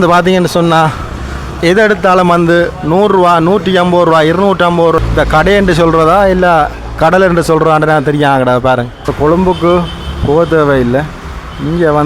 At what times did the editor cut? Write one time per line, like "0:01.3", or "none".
0:05.0
0:09.1